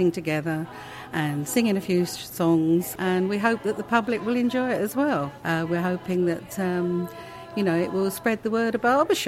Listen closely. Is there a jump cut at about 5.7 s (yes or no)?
no